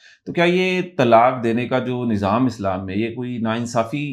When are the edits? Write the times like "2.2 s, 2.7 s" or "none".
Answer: none